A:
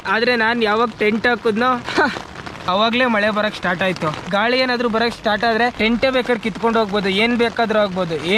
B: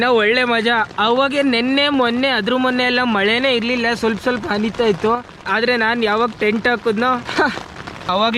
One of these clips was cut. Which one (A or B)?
A